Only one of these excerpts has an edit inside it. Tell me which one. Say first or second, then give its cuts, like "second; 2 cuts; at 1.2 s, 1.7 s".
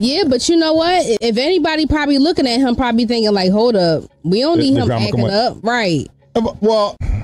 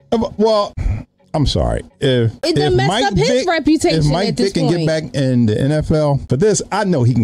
second; 2 cuts; at 2.3 s, 6.2 s